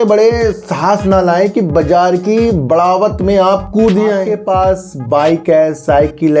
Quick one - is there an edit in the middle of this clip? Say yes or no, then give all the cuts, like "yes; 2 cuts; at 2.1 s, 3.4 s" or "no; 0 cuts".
yes; 1 cut; at 4.3 s